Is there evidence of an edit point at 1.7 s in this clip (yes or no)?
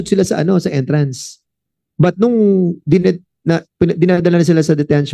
no